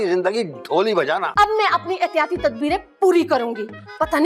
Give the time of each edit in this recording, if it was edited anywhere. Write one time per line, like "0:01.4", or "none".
0:01.3